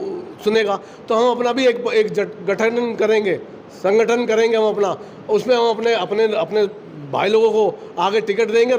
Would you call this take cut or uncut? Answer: uncut